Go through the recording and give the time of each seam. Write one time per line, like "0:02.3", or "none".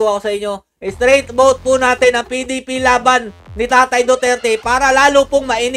none